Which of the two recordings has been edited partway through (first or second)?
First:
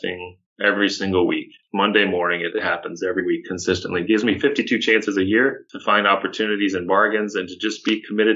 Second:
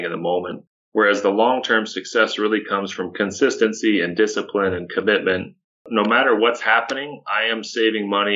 second